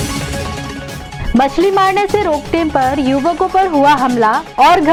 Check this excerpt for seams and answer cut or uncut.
uncut